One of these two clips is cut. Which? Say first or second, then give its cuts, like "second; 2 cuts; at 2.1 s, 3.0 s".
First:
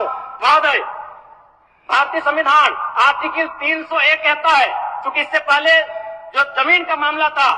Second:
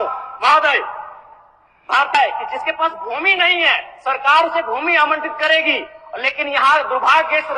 second; 1 cut; at 2.1 s